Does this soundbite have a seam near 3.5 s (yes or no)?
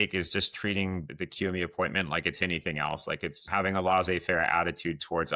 yes